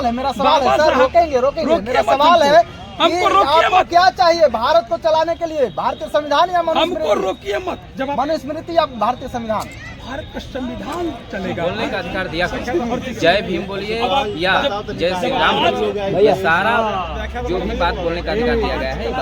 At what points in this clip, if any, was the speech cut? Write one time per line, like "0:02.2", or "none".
0:11.6